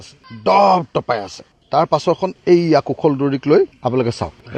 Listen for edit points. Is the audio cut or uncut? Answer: uncut